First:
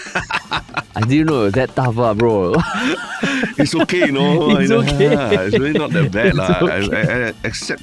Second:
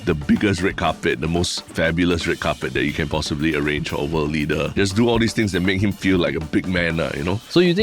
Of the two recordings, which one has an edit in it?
second; 1 cut; at 4.7 s

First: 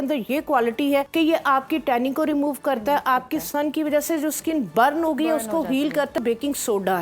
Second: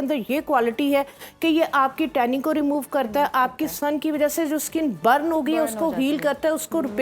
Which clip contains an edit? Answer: first; 2 cuts; at 1.1 s, 6.2 s

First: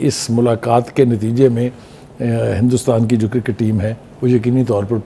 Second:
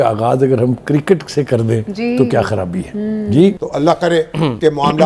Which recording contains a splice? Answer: second; 1 cut; at 3.6 s

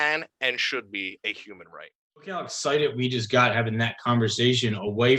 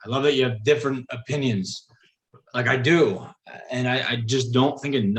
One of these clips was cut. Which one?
first; 1 cut; at 2.3 s

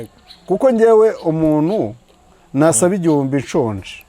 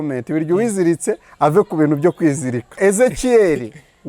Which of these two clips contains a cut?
second; 1 cut; at 2.8 s

